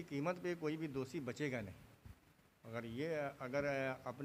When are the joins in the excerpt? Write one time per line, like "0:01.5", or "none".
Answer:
none